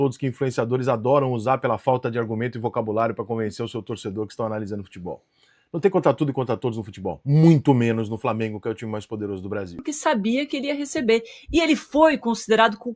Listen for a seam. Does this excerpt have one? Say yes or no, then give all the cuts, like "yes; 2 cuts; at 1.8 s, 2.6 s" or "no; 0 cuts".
yes; 1 cut; at 9.8 s